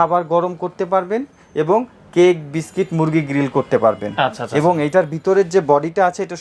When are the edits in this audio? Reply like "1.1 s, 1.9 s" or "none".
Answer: none